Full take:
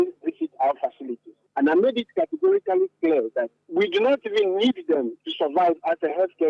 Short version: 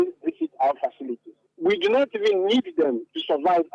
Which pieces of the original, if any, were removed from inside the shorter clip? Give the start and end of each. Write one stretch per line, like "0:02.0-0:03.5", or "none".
0:01.4-0:03.6